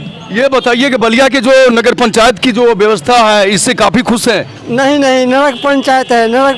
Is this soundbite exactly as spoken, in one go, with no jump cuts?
yes; 0 cuts

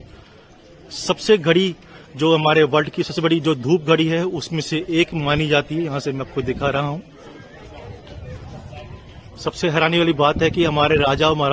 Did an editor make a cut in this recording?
no; 0 cuts

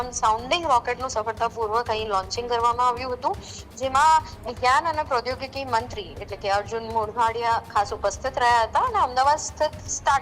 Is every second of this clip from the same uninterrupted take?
yes; 0 cuts

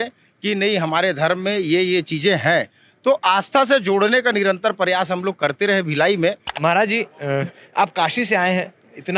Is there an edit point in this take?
yes; 1 cut; at 6.5 s

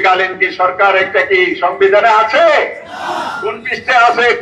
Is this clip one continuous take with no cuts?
yes; 0 cuts

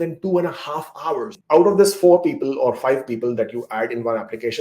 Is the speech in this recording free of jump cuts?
no; 1 cut; at 1.3 s

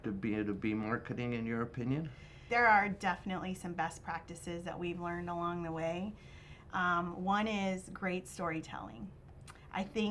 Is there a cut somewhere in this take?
yes; 1 cut; at 2.4 s

